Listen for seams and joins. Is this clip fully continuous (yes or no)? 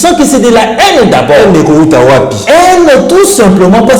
yes